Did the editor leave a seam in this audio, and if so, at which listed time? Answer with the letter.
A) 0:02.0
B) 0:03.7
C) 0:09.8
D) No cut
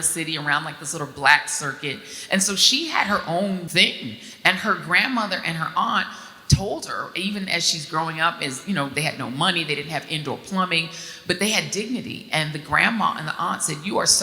B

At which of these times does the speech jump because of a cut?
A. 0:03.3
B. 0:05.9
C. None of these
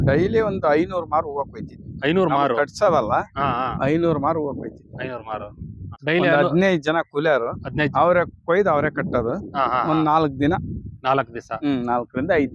B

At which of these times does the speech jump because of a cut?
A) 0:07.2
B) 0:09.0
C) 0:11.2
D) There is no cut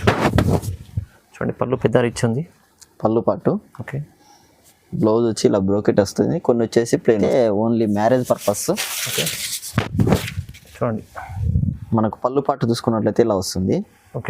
A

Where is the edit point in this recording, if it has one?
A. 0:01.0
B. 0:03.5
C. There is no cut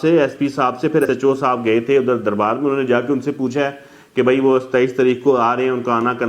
A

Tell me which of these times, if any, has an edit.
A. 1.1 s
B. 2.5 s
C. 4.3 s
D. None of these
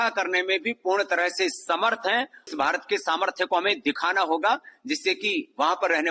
B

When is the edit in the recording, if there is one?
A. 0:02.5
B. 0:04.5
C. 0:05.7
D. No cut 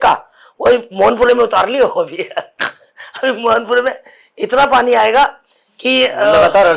D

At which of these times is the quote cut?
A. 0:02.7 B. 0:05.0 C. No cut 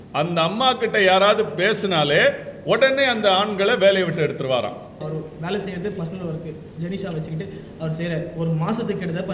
B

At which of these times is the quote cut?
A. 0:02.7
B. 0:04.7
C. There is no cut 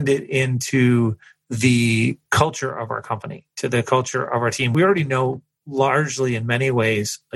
B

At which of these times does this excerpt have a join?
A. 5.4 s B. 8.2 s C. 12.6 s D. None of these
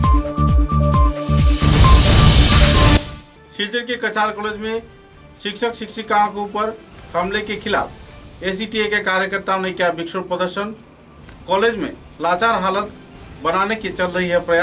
D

